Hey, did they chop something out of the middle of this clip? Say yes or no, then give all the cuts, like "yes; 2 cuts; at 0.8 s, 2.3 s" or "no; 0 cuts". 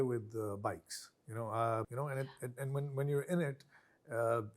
no; 0 cuts